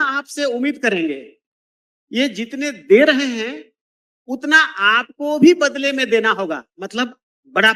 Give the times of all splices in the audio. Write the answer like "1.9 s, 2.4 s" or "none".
none